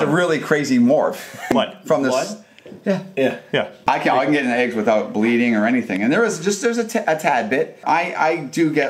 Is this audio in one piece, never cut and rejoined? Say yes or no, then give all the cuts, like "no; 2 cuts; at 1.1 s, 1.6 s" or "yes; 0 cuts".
no; 3 cuts; at 1.5 s, 3.8 s, 7.8 s